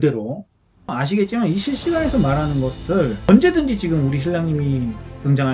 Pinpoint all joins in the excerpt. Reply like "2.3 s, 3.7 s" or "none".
1.0 s, 3.3 s